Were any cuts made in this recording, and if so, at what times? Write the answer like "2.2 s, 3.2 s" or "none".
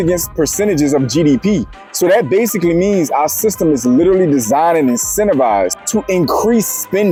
none